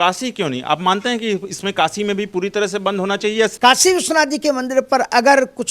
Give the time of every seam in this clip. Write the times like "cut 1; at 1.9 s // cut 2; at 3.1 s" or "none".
cut 1; at 3.5 s